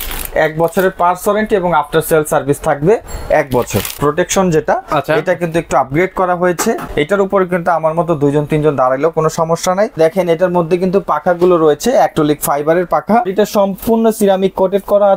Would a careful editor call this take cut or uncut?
cut